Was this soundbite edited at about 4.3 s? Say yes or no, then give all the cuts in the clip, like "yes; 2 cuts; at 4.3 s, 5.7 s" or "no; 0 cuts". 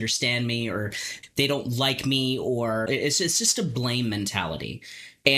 no; 2 cuts; at 1.1 s, 2.9 s